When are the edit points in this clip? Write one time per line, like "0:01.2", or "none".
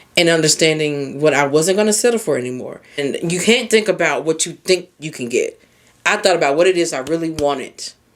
0:03.0